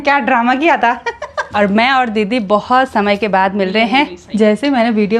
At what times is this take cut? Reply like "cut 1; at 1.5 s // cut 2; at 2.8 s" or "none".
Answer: cut 1; at 1.5 s // cut 2; at 4.2 s